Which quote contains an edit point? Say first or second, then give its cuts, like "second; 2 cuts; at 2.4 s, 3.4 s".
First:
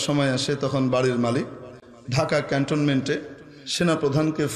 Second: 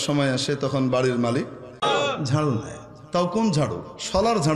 second; 1 cut; at 1.8 s